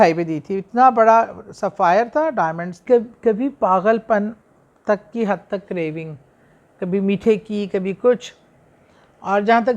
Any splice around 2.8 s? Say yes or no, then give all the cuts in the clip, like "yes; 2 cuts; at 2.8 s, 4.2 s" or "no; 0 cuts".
yes; 1 cut; at 2.8 s